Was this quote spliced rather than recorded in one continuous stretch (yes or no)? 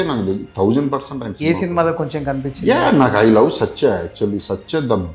no